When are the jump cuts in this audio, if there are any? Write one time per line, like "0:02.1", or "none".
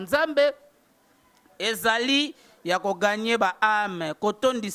none